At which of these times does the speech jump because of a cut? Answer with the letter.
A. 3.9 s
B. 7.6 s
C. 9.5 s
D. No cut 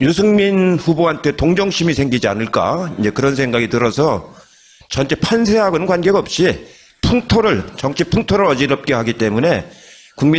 D